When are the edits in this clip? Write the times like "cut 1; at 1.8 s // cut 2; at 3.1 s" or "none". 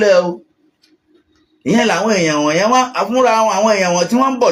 none